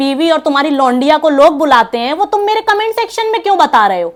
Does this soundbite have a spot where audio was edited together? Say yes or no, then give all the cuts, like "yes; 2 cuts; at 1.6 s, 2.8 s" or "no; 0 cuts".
no; 0 cuts